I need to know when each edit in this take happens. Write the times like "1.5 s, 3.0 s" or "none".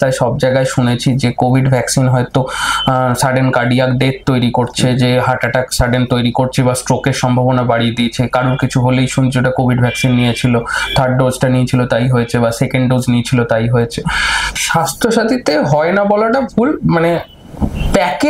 14.6 s